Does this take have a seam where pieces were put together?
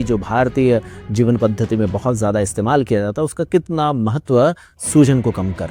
no; 0 cuts

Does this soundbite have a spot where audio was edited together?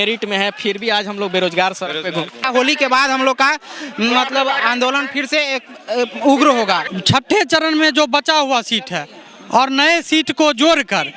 yes; 2 cuts; at 2.4 s, 6.9 s

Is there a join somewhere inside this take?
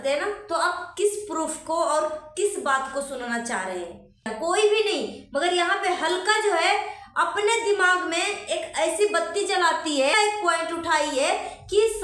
yes; 2 cuts; at 4.3 s, 10.1 s

